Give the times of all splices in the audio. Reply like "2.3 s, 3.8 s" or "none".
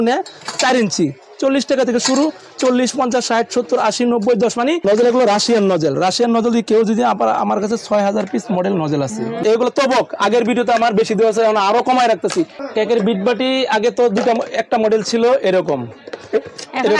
4.8 s, 9.3 s, 12.6 s

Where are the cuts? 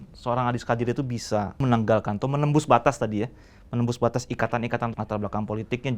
1.6 s, 4.9 s

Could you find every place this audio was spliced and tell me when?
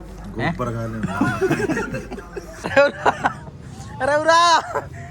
2.7 s

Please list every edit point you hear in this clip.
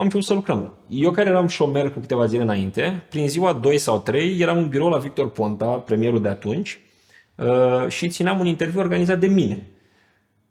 none

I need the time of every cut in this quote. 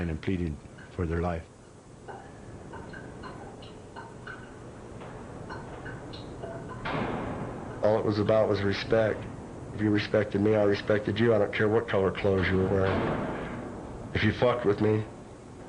none

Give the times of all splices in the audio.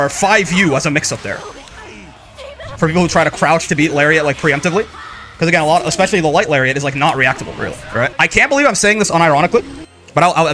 8.1 s

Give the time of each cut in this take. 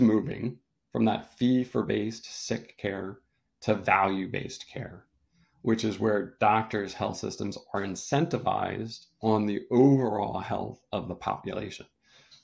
none

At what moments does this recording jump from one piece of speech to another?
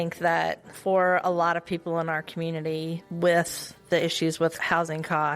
3.0 s, 4.6 s

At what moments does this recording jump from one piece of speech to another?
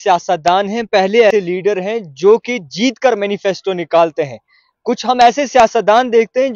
1.3 s

